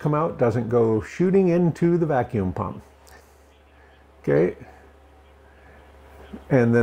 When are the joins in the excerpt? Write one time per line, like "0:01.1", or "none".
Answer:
0:03.2